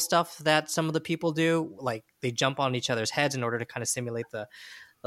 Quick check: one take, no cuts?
yes; 0 cuts

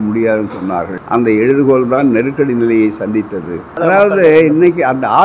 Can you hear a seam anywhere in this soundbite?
yes; 2 cuts; at 1.0 s, 3.6 s

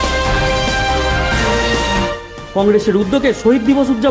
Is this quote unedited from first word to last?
no; 1 cut; at 2.3 s

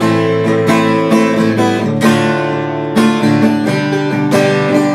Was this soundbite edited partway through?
no; 0 cuts

